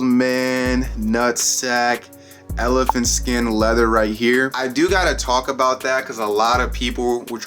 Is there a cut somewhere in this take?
no; 0 cuts

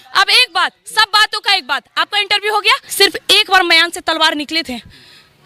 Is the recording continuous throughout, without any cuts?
no; 1 cut; at 2.9 s

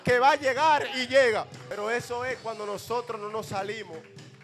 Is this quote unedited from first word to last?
no; 1 cut; at 1.6 s

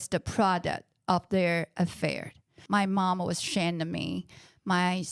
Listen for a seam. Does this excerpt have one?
yes; 1 cut; at 2.5 s

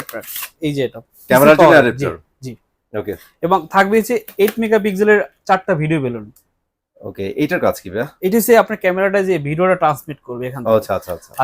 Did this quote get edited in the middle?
no; 0 cuts

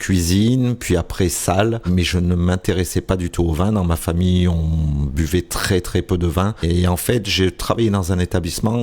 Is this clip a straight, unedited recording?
no; 2 cuts; at 1.9 s, 6.6 s

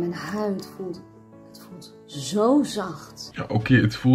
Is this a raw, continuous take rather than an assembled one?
yes; 0 cuts

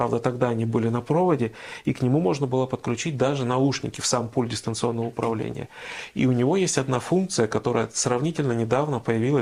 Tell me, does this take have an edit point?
no; 0 cuts

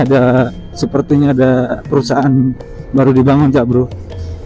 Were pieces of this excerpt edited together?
no; 0 cuts

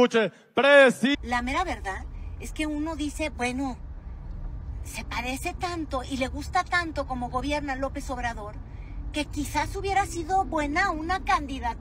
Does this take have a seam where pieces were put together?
yes; 1 cut; at 1.1 s

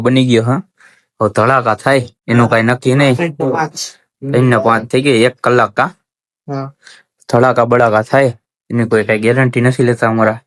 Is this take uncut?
yes; 0 cuts

